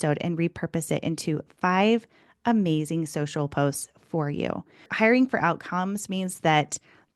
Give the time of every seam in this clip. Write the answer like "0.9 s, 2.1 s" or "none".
4.9 s

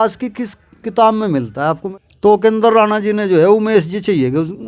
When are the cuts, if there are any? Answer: 1.9 s

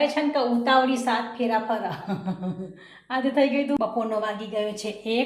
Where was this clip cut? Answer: 3.8 s

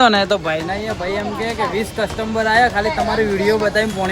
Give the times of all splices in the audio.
none

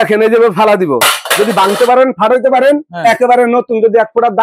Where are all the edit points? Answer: none

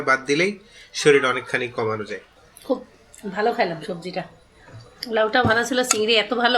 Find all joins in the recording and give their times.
none

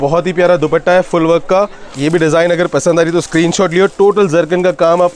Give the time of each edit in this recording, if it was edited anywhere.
1.9 s

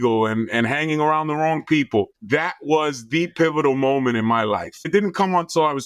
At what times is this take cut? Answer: 2.2 s, 4.9 s

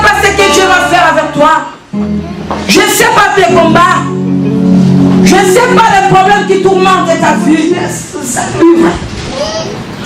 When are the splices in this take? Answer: 7.7 s

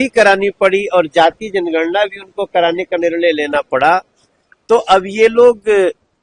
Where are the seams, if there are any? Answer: none

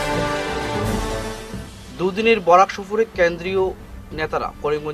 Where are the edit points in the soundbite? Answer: none

